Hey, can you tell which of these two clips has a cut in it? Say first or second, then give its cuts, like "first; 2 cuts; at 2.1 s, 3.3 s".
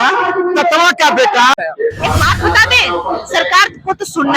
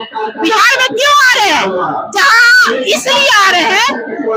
first; 1 cut; at 1.5 s